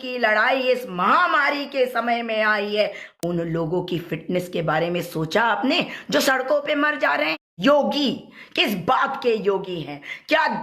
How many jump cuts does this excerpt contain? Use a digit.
2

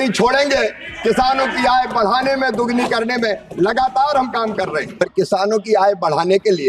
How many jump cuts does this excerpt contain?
1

